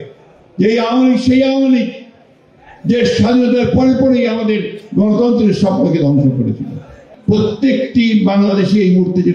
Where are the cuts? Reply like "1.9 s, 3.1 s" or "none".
7.1 s